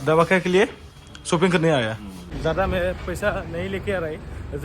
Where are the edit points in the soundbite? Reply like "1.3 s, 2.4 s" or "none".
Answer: 2.4 s